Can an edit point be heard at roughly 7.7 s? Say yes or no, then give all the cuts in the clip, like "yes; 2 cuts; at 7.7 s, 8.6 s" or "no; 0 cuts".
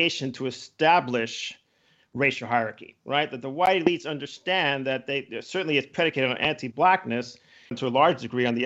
yes; 1 cut; at 7.7 s